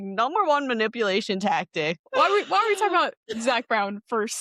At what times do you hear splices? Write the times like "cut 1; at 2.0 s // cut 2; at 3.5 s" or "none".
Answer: cut 1; at 2.0 s